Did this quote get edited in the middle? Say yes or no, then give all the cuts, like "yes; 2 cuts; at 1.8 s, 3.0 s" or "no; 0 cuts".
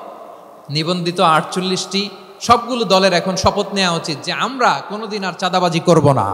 no; 0 cuts